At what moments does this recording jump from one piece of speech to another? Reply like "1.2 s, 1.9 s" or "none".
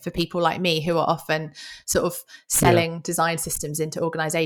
none